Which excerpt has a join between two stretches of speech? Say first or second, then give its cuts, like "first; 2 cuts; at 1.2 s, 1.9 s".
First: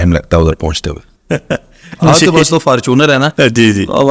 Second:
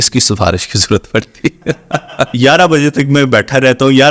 second; 1 cut; at 2.3 s